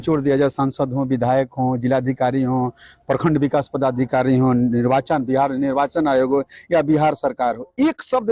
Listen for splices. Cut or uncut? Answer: uncut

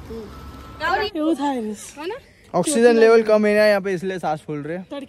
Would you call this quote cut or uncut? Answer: cut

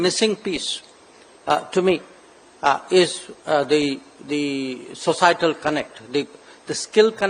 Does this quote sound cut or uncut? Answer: uncut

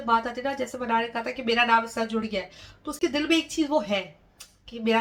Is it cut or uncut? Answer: uncut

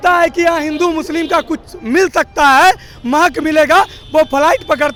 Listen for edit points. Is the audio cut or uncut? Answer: uncut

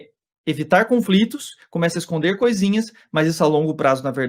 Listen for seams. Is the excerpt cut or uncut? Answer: uncut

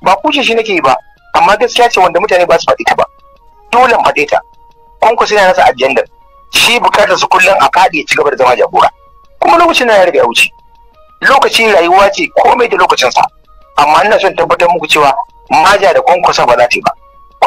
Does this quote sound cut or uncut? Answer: uncut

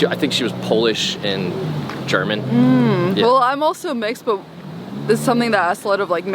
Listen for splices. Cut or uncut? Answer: uncut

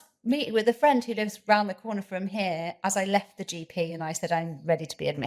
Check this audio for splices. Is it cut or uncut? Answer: uncut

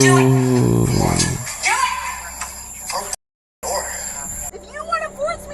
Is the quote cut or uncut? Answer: cut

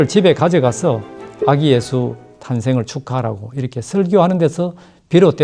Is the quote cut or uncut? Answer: uncut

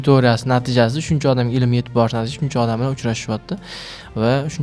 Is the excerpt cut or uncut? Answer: uncut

